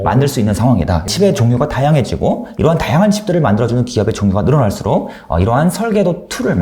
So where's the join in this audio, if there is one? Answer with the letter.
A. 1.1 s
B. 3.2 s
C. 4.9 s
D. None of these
A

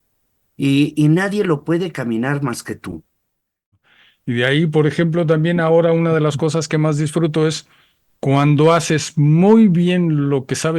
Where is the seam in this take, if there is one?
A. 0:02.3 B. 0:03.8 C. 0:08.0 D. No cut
B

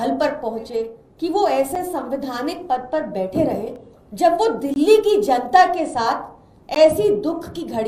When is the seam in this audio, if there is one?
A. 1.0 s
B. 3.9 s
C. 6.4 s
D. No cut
A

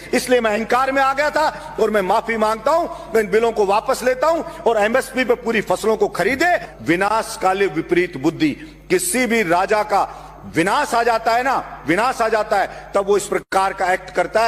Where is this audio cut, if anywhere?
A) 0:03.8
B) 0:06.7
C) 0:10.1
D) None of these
B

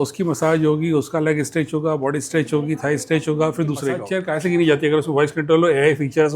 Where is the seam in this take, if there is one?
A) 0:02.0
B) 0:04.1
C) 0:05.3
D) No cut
B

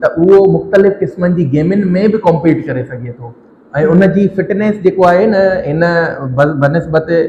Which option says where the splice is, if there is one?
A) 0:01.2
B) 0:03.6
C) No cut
C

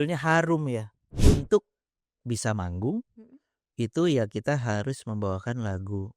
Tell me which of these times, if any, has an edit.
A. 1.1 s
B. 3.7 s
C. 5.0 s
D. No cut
A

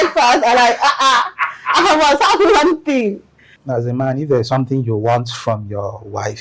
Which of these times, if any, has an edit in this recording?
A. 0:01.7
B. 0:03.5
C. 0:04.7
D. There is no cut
B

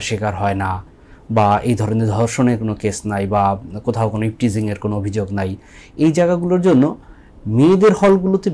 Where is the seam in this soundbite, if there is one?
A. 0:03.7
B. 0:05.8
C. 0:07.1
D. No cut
D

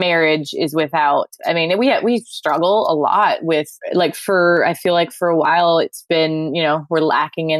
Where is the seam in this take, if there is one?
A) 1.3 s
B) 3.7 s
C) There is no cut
B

